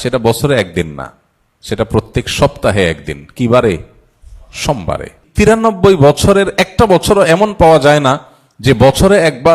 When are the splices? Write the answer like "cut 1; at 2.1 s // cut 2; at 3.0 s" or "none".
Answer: cut 1; at 5.3 s